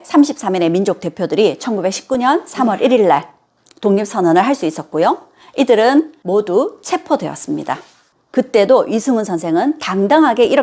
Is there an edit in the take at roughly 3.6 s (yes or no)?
no